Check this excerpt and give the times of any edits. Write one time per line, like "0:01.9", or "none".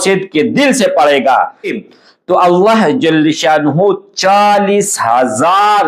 0:01.8